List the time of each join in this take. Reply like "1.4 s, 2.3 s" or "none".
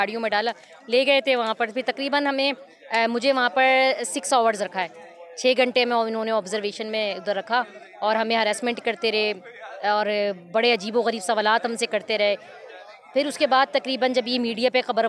none